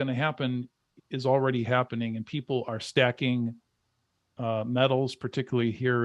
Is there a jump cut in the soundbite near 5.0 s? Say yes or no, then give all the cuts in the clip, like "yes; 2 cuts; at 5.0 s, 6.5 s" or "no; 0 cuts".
no; 0 cuts